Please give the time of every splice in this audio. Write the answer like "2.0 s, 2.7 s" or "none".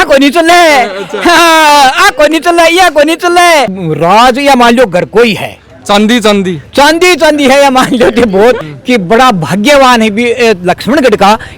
3.8 s, 8.7 s